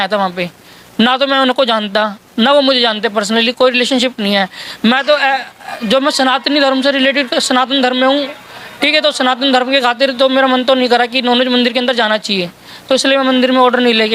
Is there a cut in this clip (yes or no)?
no